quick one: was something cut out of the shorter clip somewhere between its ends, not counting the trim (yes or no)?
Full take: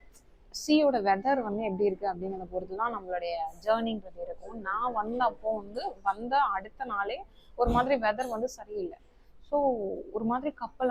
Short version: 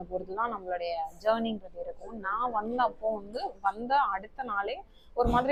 no